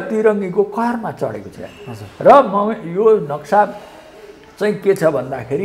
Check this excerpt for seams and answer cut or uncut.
uncut